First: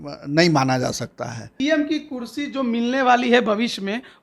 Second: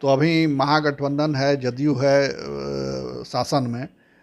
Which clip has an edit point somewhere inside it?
first; 1 cut; at 1.5 s

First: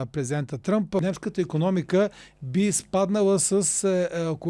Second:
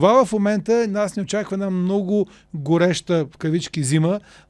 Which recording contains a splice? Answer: first; 1 cut; at 1.0 s

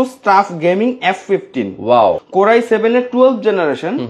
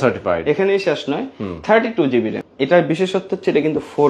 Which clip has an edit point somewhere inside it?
second; 1 cut; at 2.4 s

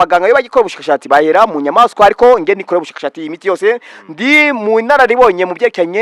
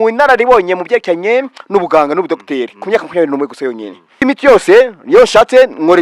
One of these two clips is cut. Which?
second; 1 cut; at 4.2 s

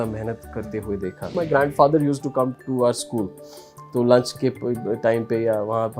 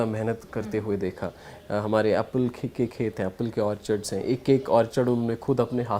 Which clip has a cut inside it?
first; 1 cut; at 1.3 s

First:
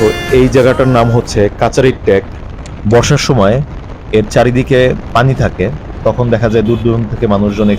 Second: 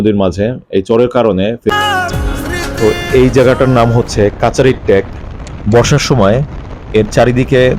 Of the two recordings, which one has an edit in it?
second; 1 cut; at 1.7 s

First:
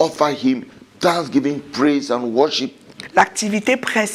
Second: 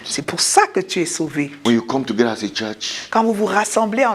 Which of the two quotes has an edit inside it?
second; 1 cut; at 1.5 s

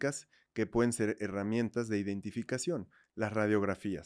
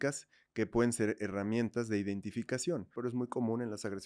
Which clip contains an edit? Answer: second; 1 cut; at 3.0 s

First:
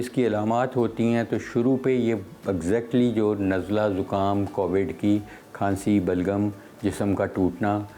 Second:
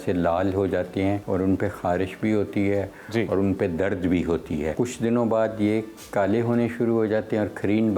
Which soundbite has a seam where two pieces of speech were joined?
second; 2 cuts; at 1.2 s, 4.7 s

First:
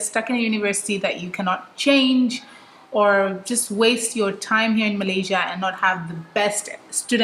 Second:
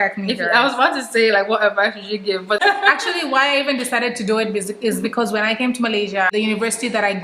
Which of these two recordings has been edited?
second; 2 cuts; at 2.6 s, 6.3 s

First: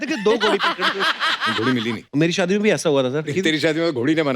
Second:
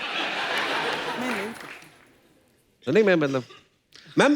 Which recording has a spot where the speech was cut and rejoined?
first; 2 cuts; at 1.7 s, 3.3 s

